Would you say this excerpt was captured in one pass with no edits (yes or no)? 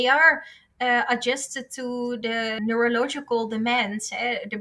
no